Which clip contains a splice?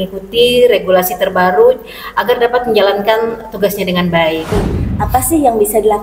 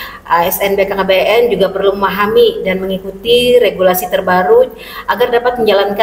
first; 1 cut; at 4.5 s

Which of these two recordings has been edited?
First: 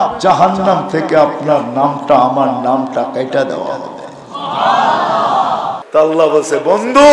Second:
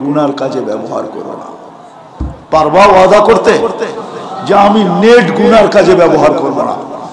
first; 1 cut; at 5.8 s

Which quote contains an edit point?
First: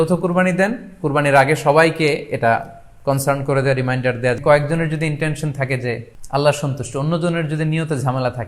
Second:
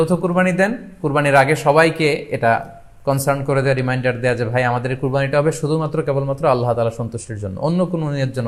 first; 2 cuts; at 4.4 s, 6.1 s

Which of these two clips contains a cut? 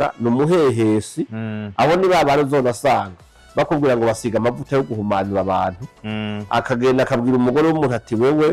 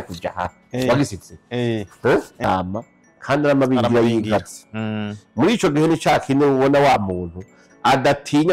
second; 1 cut; at 2.4 s

